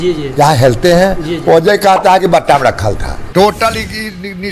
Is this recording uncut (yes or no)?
no